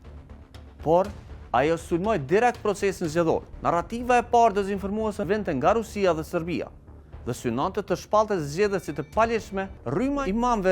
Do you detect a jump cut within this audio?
yes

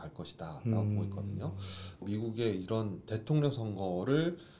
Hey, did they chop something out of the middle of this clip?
yes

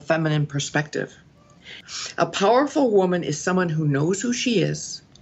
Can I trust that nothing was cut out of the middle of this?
no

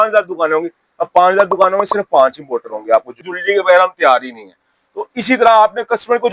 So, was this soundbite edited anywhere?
yes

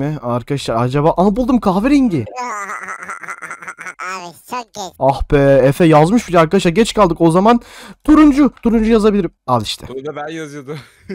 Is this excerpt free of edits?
yes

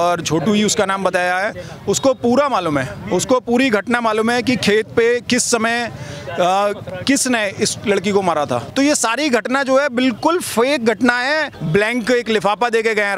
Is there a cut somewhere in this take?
yes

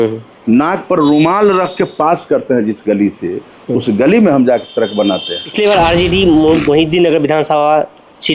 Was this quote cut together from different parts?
yes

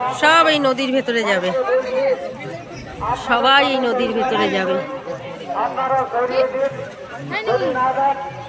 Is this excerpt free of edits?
yes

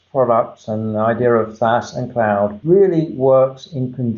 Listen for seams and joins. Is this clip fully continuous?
no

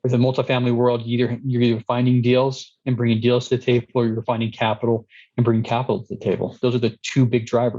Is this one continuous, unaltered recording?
no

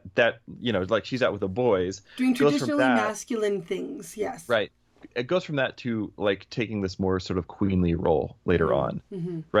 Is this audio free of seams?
yes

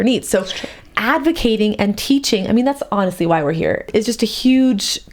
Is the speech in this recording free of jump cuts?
no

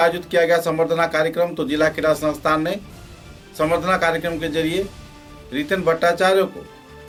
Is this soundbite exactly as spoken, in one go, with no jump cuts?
yes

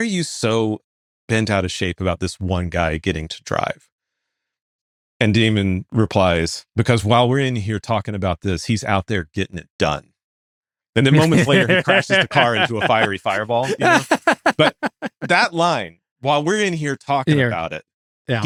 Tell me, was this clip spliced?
no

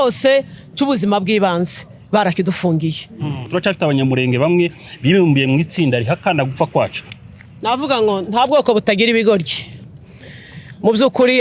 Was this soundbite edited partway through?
yes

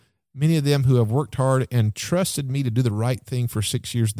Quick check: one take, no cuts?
yes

